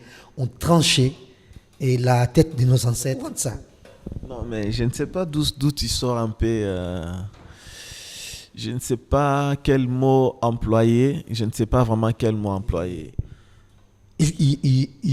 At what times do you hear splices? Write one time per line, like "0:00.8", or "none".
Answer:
0:03.3
0:13.1